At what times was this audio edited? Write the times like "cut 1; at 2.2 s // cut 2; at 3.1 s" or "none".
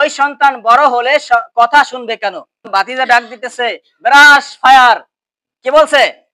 cut 1; at 2.7 s